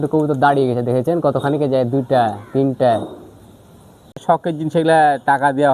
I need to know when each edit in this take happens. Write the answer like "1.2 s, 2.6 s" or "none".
4.2 s